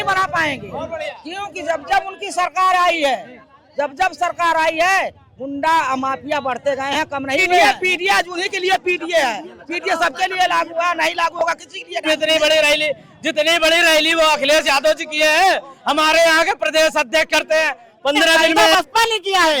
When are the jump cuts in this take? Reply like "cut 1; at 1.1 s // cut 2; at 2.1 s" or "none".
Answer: cut 1; at 7.6 s // cut 2; at 12.1 s // cut 3; at 18.7 s